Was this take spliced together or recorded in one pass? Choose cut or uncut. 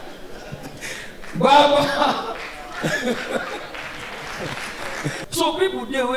cut